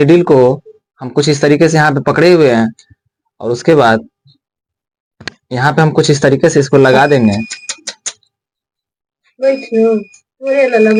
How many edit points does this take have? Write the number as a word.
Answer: zero